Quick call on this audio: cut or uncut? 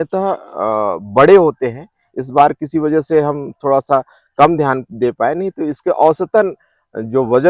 uncut